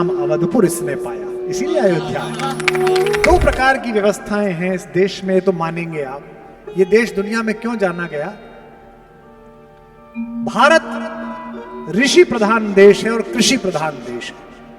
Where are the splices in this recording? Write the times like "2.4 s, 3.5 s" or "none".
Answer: 3.2 s